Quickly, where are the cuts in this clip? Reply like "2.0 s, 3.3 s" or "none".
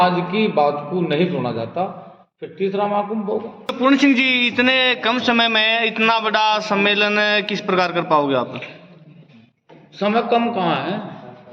3.8 s